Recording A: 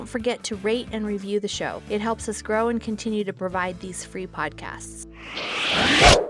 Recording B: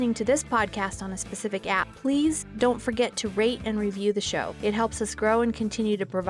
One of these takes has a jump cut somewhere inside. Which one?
A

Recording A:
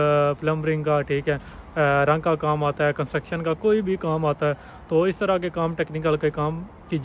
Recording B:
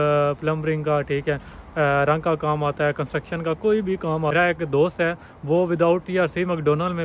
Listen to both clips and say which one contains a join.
B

